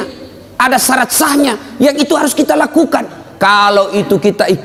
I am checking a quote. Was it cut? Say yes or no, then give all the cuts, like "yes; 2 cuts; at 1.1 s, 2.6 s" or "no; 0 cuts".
no; 0 cuts